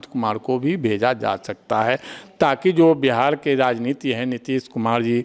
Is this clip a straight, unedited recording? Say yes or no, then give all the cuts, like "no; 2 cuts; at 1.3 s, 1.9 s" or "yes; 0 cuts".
yes; 0 cuts